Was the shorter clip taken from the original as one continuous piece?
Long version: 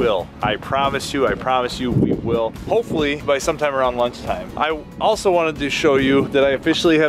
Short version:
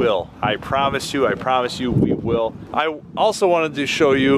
no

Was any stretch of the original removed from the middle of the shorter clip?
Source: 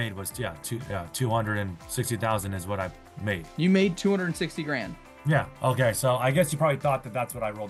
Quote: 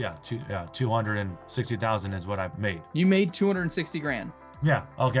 yes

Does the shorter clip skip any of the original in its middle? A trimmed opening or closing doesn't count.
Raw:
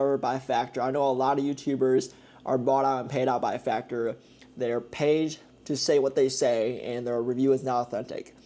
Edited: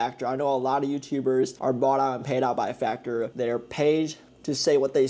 yes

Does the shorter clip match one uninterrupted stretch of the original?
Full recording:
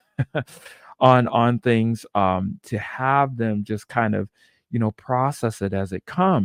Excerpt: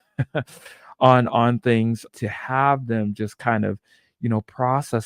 no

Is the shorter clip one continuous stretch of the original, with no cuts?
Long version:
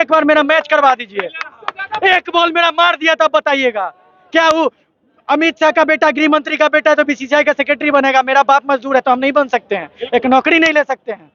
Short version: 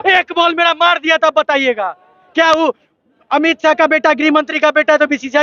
yes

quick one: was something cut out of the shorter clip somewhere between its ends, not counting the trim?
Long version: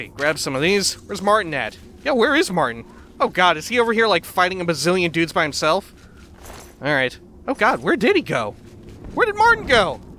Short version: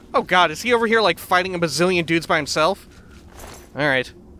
no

